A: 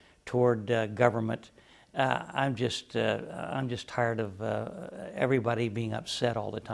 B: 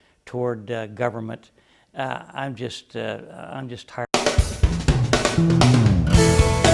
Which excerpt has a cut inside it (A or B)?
A